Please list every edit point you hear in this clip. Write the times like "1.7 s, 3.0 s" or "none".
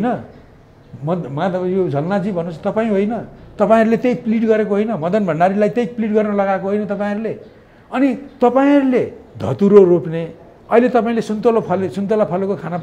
none